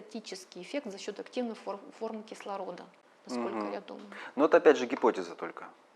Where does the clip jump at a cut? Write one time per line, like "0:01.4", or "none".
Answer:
none